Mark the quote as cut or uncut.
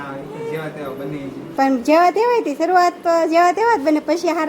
cut